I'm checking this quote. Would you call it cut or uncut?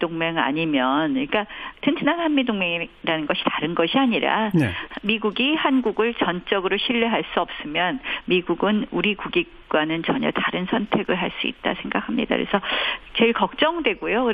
cut